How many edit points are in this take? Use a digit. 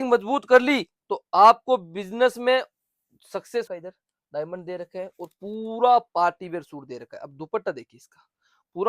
1